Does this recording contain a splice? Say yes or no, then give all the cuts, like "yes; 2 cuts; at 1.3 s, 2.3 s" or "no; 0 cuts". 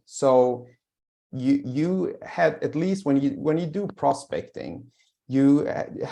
no; 0 cuts